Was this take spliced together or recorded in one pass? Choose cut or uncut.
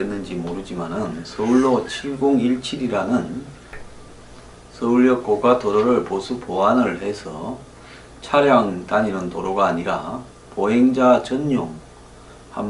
cut